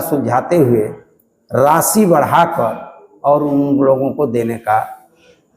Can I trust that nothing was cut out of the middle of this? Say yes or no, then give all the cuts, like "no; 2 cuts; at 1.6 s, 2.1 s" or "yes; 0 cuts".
yes; 0 cuts